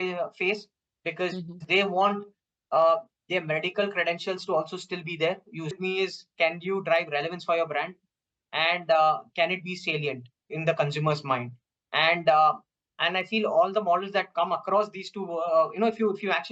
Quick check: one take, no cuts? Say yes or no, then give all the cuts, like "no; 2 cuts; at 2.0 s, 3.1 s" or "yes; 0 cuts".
no; 1 cut; at 5.8 s